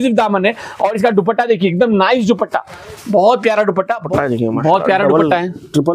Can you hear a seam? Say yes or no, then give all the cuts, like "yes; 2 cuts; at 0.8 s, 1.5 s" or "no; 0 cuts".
yes; 1 cut; at 4.0 s